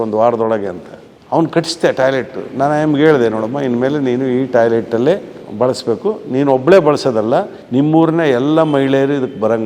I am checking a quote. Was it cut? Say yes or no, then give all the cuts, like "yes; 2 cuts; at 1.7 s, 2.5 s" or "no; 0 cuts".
yes; 1 cut; at 5.4 s